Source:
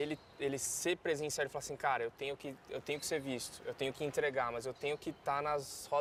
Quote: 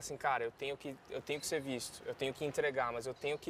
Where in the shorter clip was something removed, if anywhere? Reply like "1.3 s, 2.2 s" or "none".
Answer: none